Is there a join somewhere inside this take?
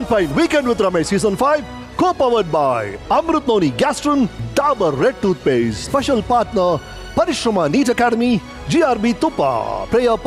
no; 0 cuts

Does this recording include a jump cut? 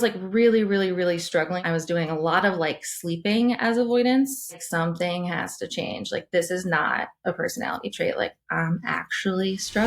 yes; 2 cuts; at 1.6 s, 4.6 s

